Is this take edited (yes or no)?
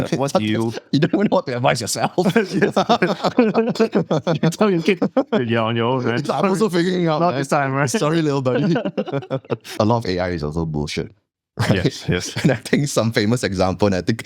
yes